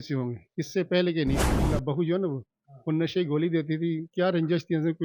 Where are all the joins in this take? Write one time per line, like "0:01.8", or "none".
0:01.7